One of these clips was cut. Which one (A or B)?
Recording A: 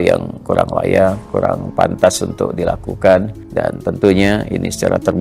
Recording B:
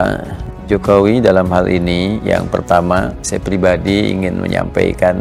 A